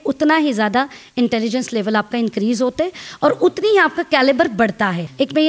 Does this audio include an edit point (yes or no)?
no